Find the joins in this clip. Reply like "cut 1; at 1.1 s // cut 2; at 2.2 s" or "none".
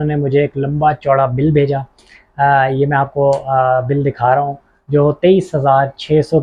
none